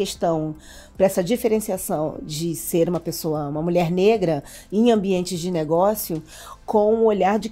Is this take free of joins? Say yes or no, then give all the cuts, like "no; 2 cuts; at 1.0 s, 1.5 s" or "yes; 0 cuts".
yes; 0 cuts